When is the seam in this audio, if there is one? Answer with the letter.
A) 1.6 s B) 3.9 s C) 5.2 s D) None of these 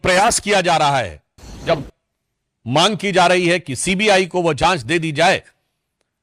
A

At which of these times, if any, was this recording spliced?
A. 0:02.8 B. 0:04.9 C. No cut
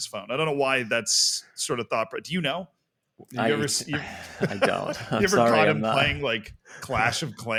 C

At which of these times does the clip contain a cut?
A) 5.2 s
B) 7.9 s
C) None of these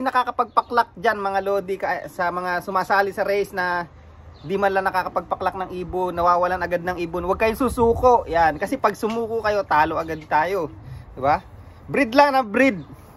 C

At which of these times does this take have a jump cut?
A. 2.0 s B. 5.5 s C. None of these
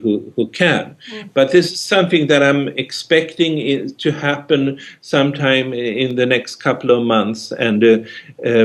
A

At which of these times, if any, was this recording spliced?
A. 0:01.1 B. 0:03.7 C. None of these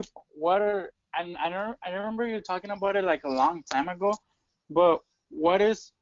C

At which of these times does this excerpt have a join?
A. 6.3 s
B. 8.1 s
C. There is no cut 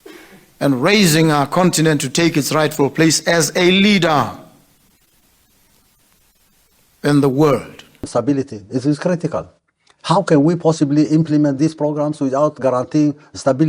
B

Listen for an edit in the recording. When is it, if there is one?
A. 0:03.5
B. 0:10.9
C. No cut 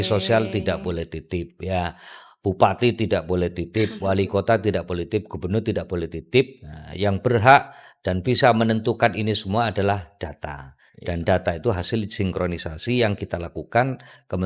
C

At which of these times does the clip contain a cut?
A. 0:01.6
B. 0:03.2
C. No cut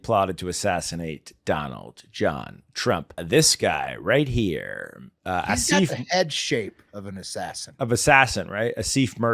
B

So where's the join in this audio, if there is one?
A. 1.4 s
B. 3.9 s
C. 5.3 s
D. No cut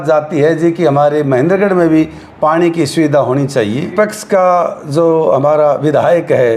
B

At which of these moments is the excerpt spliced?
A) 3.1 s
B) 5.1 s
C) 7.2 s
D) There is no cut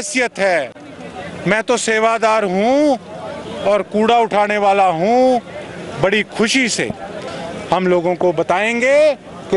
C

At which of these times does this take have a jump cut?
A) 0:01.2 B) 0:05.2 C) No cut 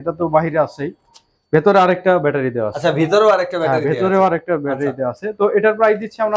C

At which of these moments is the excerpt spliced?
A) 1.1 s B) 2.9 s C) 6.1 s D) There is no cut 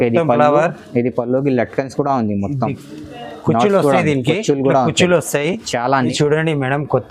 C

